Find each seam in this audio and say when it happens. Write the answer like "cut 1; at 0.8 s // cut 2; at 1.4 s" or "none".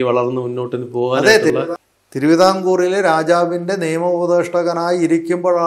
cut 1; at 1.5 s